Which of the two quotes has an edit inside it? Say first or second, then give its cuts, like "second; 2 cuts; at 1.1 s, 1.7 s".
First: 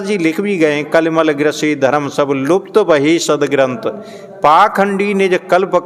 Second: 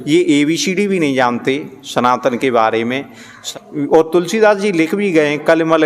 second; 1 cut; at 3.4 s